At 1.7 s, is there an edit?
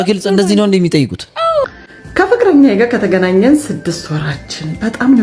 yes; 1 cut; at 1.7 s

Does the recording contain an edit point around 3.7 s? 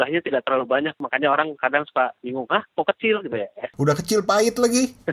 yes; 2 cuts; at 1.0 s, 3.7 s

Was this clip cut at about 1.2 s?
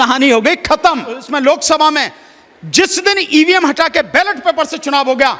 yes; 1 cut; at 1.2 s

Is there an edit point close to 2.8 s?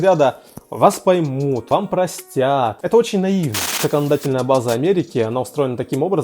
yes; 3 cuts; at 1.6 s, 2.8 s, 3.8 s

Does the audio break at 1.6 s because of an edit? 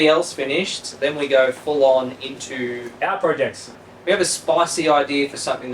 no; 1 cut; at 3.8 s

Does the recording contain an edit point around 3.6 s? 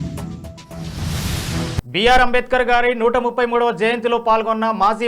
no; 1 cut; at 1.4 s

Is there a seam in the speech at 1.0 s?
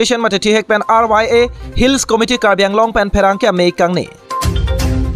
no; 1 cut; at 4.2 s

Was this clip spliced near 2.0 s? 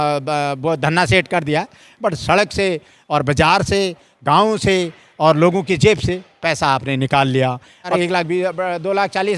no; 1 cut; at 7.9 s

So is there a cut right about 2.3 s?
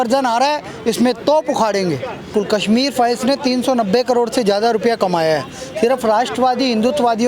yes; 1 cut; at 2.3 s

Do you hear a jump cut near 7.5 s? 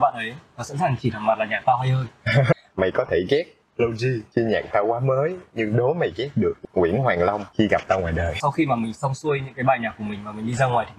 yes; 5 cuts; at 2.5 s, 4.2 s, 6.6 s, 7.5 s, 8.4 s

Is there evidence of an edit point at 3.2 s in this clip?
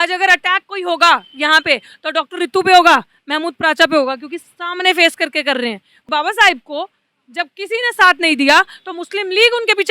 no; 1 cut; at 5.9 s

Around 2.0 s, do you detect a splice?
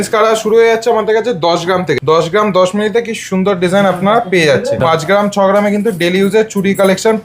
yes; 2 cuts; at 2.0 s, 4.8 s

